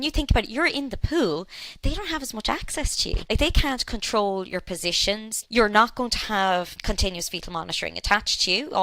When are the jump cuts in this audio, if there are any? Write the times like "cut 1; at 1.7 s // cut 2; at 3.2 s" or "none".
cut 1; at 3.2 s // cut 2; at 5.3 s // cut 3; at 6.8 s